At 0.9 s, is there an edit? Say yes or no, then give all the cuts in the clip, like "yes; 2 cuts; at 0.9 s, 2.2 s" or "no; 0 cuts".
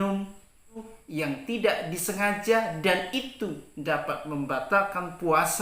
yes; 1 cut; at 0.9 s